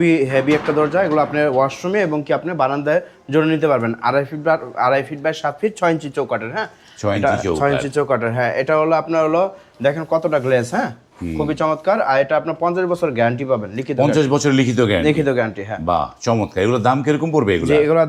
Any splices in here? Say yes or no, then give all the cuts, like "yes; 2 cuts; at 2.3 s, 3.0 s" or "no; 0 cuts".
no; 0 cuts